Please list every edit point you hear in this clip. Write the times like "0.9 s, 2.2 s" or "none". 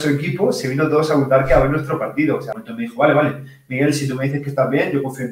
2.6 s